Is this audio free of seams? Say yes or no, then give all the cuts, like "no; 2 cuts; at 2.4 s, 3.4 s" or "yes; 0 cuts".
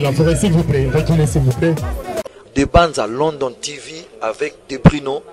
no; 1 cut; at 2.4 s